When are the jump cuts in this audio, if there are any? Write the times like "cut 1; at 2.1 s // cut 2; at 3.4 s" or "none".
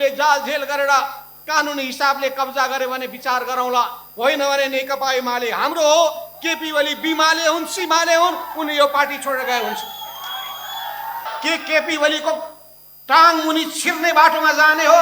cut 1; at 11.3 s